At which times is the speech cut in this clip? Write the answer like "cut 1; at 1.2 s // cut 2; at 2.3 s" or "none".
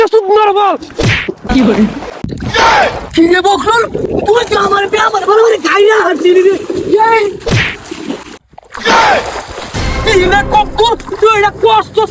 none